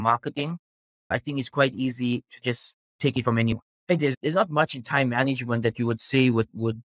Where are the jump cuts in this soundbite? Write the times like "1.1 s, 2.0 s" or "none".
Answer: 1.1 s, 3.7 s